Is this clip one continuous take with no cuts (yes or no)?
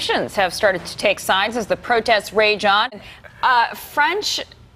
no